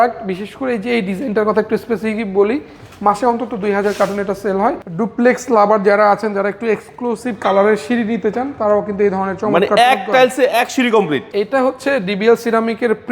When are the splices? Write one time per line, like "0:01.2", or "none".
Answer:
0:04.9
0:11.2